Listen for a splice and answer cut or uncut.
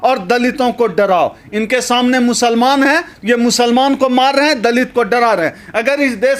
uncut